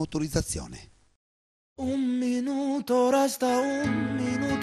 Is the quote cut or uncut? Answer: cut